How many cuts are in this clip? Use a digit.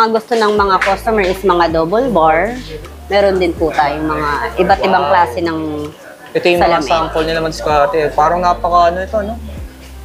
0